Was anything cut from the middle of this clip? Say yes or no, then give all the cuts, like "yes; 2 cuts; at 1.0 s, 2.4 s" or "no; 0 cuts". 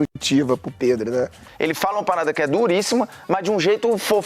yes; 1 cut; at 1.4 s